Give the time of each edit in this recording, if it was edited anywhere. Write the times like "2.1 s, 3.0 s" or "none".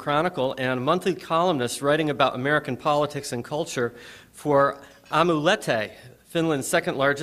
2.1 s